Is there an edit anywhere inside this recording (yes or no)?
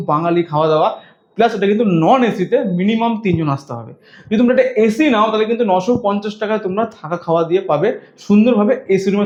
no